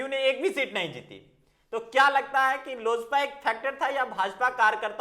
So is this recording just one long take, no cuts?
yes; 0 cuts

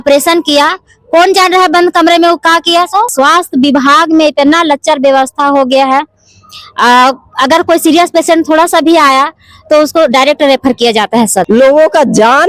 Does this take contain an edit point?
yes; 2 cuts; at 3.1 s, 11.5 s

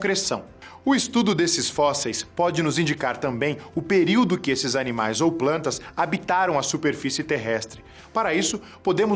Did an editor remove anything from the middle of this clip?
no; 0 cuts

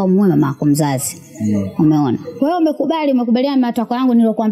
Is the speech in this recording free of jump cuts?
no; 1 cut; at 2.4 s

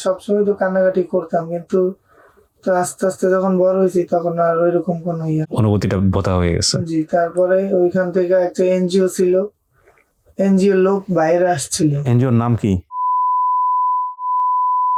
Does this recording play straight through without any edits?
yes; 0 cuts

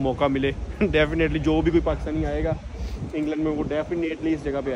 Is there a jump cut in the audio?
no; 0 cuts

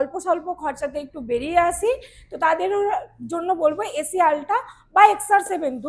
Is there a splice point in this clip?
no; 0 cuts

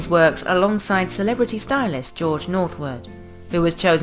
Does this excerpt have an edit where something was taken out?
no; 0 cuts

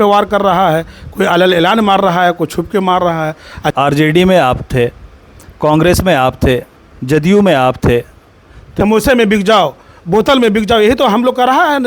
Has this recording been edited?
yes; 2 cuts; at 3.7 s, 8.6 s

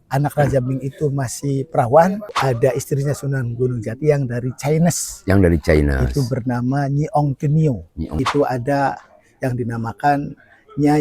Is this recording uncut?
no; 2 cuts; at 2.3 s, 8.0 s

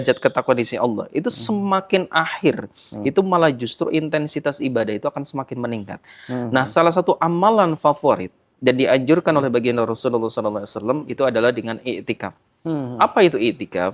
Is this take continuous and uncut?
yes; 0 cuts

